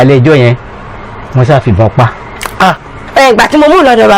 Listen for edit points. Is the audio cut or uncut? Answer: cut